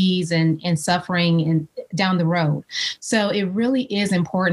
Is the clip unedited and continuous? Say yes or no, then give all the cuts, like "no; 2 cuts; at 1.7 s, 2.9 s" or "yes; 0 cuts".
yes; 0 cuts